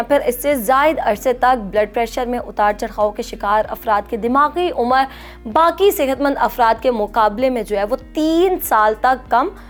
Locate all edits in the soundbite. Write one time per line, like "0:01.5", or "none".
none